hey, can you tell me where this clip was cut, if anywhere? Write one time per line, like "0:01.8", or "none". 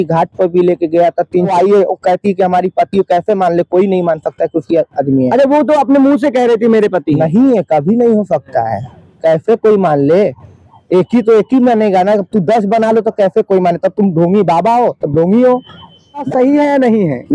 0:01.5
0:16.3